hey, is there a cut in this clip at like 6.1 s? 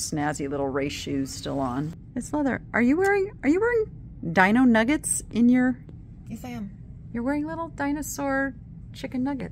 no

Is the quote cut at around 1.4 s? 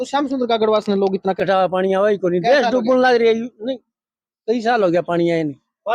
yes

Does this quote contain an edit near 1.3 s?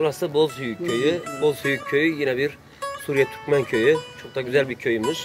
yes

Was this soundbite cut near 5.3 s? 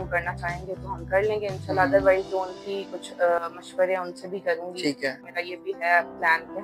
yes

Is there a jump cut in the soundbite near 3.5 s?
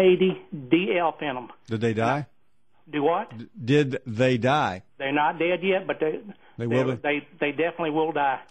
no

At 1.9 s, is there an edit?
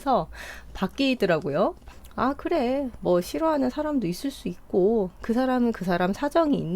yes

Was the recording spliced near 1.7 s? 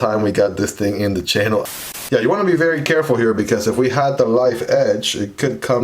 yes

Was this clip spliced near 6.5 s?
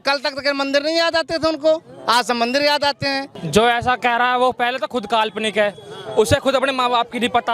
no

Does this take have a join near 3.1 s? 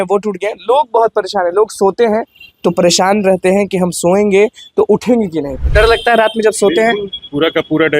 no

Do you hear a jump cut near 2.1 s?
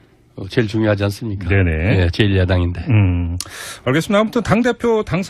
no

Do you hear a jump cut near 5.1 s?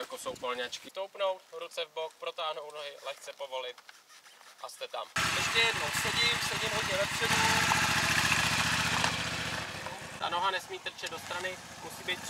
yes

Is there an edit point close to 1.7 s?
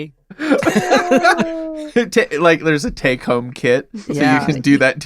yes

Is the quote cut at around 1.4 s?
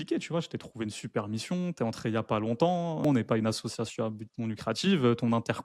no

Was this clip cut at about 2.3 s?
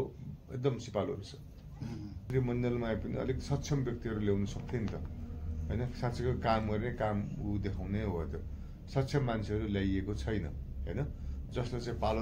yes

